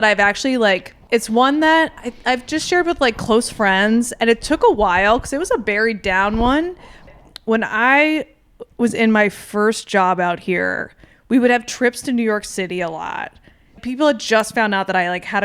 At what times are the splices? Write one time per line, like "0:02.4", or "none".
0:00.9
0:02.1
0:07.1
0:13.8